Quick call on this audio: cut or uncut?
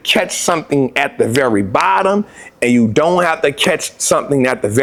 uncut